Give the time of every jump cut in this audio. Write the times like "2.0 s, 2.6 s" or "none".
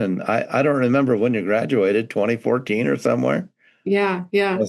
none